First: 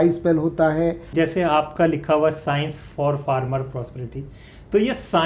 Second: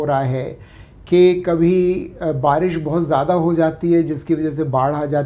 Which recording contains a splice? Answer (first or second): first